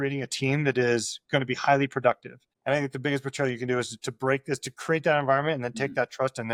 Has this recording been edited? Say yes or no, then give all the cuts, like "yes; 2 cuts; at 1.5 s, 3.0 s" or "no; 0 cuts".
no; 0 cuts